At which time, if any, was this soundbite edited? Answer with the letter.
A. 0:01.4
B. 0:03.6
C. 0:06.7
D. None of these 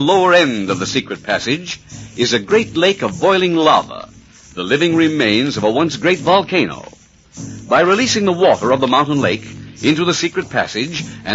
A